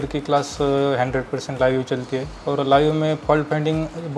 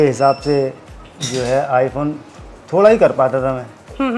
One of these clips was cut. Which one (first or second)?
first